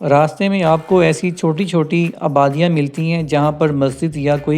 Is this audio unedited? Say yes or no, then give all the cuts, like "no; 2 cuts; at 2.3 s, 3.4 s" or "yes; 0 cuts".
yes; 0 cuts